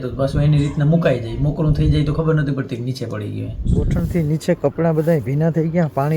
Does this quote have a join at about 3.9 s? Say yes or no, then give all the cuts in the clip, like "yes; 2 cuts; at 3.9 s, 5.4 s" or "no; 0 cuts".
yes; 1 cut; at 3.9 s